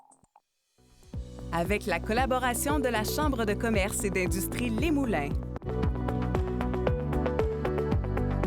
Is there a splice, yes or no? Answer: yes